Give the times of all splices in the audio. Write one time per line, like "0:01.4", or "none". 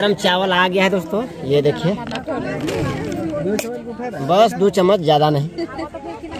none